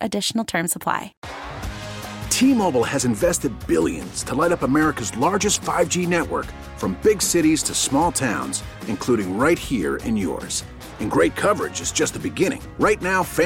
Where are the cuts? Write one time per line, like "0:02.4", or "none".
0:01.2